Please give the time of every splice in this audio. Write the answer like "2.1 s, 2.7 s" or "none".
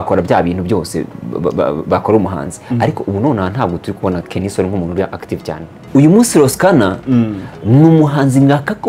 5.8 s